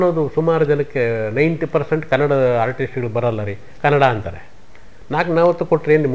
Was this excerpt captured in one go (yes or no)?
yes